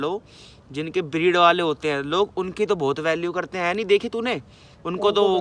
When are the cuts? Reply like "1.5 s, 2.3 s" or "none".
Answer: none